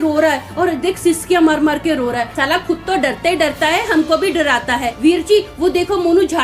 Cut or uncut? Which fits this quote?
cut